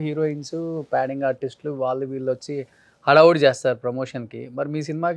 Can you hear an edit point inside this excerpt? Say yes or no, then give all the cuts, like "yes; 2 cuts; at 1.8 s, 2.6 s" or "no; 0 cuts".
no; 0 cuts